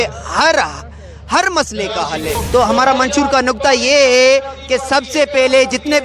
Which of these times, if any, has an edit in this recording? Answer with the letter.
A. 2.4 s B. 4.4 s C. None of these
A